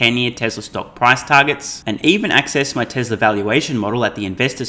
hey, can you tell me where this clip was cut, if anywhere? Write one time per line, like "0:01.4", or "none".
none